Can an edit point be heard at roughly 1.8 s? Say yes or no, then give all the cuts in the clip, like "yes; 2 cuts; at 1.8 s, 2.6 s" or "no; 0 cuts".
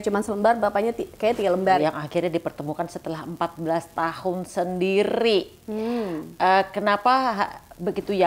yes; 1 cut; at 1.8 s